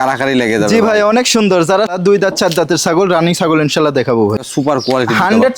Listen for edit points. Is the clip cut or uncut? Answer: cut